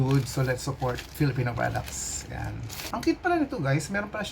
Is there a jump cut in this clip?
yes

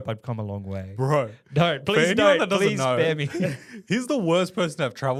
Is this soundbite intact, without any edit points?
yes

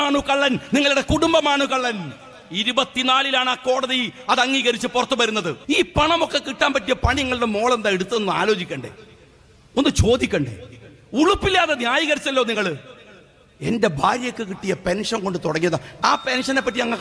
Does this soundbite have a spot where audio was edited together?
yes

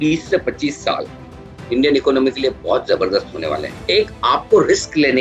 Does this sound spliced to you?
yes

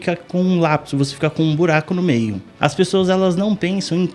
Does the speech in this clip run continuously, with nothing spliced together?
no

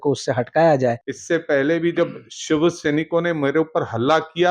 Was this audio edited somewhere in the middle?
yes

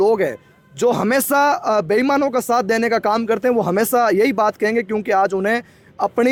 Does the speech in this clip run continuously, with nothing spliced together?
yes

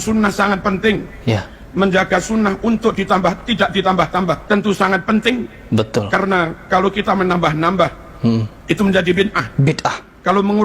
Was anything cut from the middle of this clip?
yes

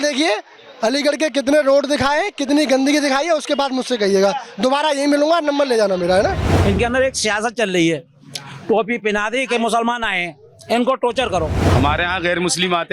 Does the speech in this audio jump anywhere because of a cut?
yes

